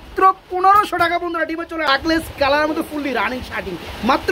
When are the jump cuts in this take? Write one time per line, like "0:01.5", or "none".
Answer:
0:01.9